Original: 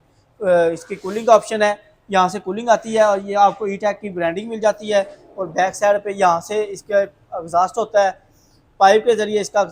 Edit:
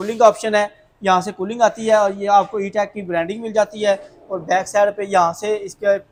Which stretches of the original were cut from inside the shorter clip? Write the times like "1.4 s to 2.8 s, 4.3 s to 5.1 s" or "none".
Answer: none